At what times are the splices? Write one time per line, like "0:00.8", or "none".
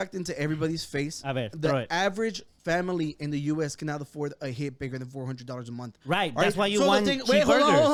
none